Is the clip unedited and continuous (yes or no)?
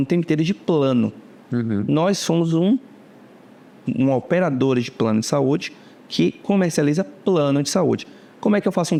yes